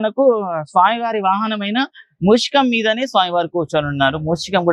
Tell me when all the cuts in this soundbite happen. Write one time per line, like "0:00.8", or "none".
none